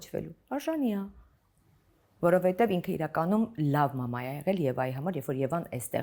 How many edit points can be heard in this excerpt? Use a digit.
0